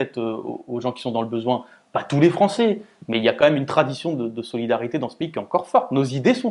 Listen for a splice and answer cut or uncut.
uncut